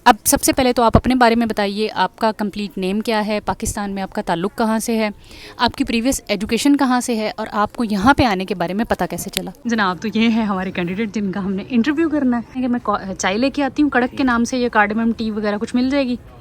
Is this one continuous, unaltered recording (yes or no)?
no